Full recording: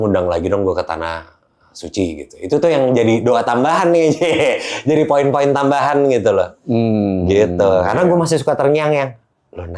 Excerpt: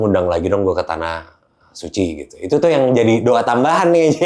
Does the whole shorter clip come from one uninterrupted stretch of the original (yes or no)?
yes